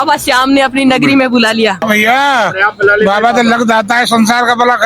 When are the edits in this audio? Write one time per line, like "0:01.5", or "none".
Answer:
0:01.8